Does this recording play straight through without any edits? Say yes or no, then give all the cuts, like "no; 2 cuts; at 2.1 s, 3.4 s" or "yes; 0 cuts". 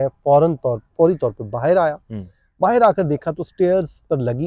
yes; 0 cuts